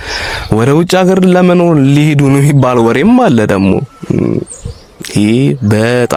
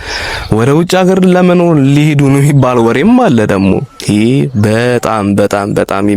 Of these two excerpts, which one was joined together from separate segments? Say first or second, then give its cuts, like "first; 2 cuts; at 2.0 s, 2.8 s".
second; 1 cut; at 3.9 s